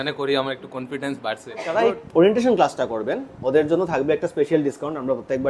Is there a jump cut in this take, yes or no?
yes